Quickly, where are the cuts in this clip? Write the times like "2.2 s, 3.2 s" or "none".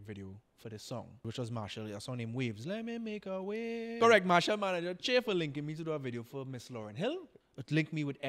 1.2 s, 3.9 s, 7.4 s

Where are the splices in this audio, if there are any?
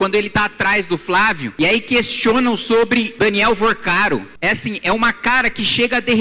1.5 s, 3.1 s, 4.3 s

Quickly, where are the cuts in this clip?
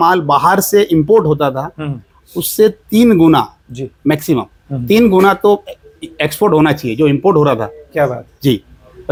none

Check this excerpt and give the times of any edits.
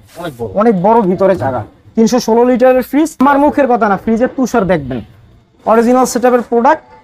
3.2 s

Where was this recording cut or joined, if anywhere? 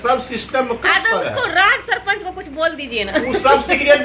none

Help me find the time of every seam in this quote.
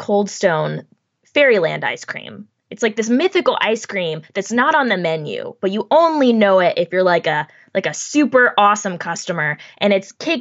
1.2 s

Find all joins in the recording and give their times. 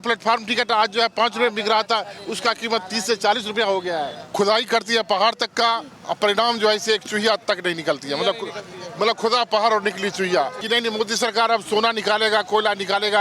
4.2 s, 10.6 s

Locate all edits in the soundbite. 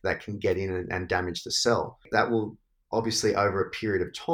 2.1 s

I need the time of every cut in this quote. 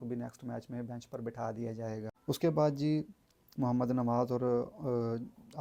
none

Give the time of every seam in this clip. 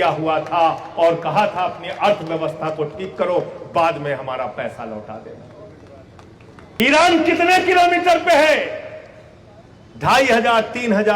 6.8 s

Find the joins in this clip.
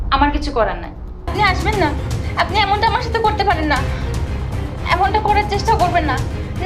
1.3 s

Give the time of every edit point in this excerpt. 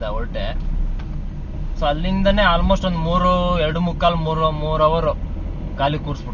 none

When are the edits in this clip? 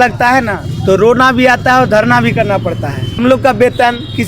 3.2 s

